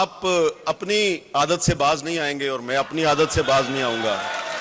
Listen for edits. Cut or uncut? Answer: uncut